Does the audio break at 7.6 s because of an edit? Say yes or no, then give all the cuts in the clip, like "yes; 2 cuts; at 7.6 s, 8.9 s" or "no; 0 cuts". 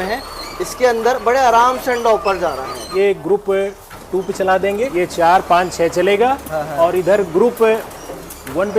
no; 2 cuts; at 2.8 s, 4.9 s